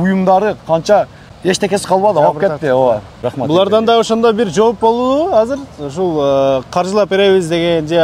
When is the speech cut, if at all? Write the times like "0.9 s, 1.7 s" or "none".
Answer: 1.2 s, 3.2 s